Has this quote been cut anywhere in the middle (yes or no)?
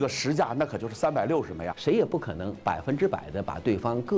yes